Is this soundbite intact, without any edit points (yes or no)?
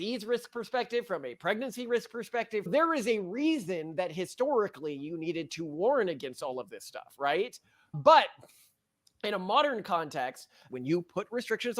no